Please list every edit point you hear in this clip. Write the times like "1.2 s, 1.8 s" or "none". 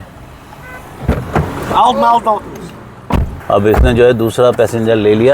3.3 s

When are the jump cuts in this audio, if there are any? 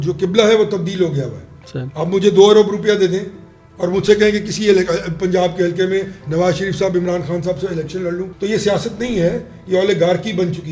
8.3 s

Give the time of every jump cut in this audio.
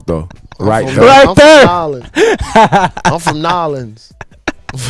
3.9 s

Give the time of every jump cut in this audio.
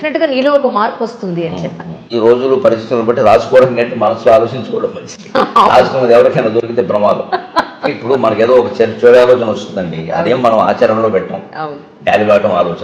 2.0 s

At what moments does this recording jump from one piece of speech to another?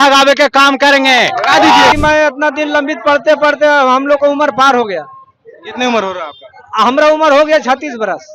1.9 s

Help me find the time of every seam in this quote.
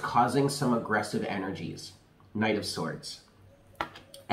none

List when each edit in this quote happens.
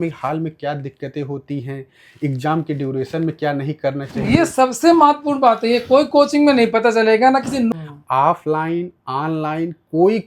7.7 s

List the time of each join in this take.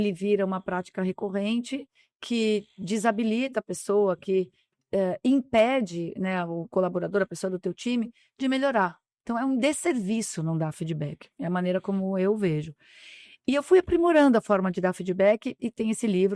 none

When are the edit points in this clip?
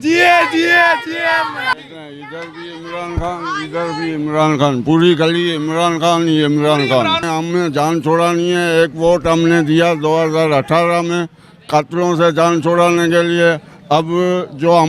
1.7 s, 7.3 s

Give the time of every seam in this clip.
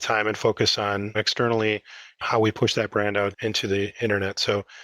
1.1 s

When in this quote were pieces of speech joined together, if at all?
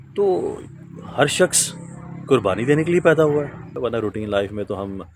3.6 s

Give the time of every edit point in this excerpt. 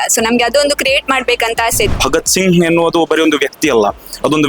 1.9 s

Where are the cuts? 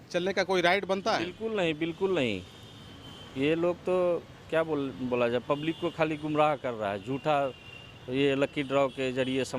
none

